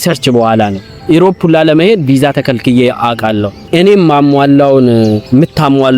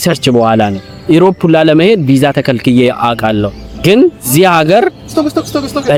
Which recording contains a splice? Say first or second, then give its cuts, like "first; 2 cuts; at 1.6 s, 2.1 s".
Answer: first; 1 cut; at 3.7 s